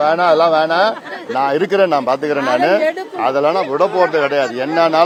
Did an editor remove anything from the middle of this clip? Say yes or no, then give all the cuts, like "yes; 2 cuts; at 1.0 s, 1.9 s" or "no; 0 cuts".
no; 0 cuts